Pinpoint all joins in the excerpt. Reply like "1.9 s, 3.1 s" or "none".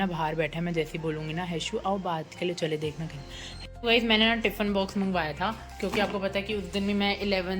3.5 s

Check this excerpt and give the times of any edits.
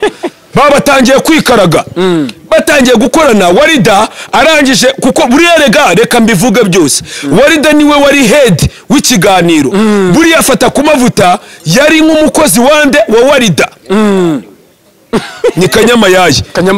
none

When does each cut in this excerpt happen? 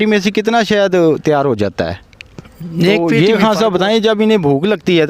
3.0 s

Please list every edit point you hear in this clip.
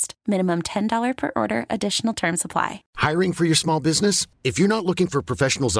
2.8 s

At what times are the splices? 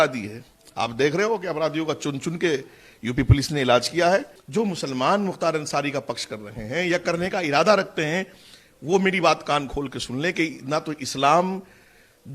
4.4 s

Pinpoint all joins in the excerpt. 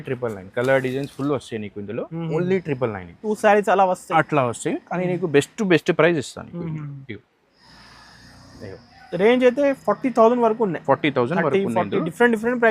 3.3 s

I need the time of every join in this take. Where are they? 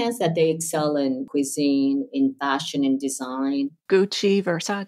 1.2 s, 3.8 s

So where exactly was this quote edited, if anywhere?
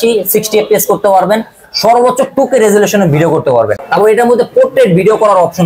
3.8 s

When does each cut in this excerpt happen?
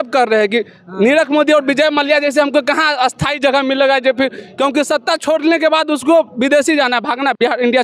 none

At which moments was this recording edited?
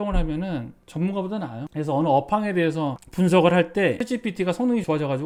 none

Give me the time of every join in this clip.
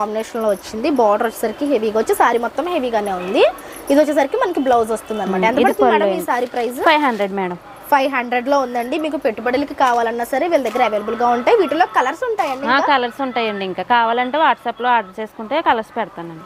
none

